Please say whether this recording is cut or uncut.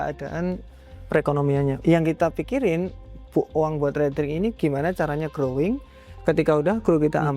cut